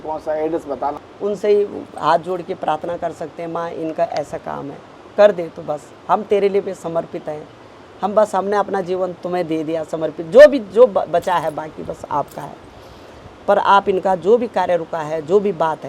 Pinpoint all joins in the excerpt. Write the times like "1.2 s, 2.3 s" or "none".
1.0 s